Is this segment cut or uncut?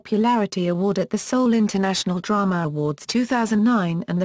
cut